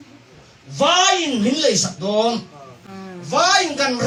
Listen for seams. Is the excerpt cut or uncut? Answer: uncut